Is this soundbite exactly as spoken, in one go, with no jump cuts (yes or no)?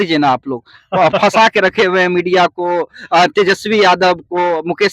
yes